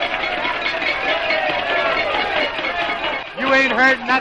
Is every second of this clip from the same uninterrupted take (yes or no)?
no